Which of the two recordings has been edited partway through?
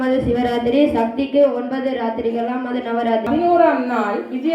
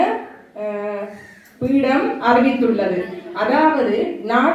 first; 1 cut; at 3.3 s

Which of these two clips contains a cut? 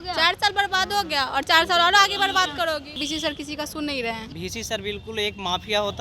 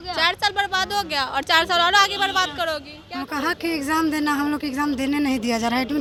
first; 2 cuts; at 3.0 s, 4.3 s

